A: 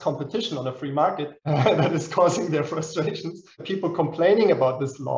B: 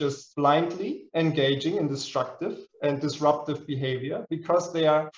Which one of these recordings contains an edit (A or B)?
A